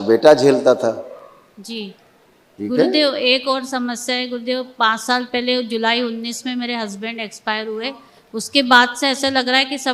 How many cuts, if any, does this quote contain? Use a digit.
1